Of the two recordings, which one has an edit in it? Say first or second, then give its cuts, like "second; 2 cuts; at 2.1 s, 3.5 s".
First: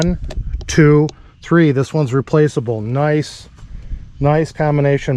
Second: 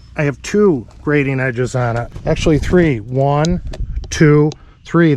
second; 1 cut; at 2.1 s